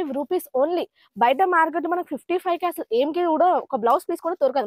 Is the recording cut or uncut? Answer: uncut